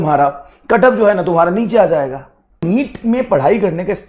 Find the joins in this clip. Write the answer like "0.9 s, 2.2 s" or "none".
2.6 s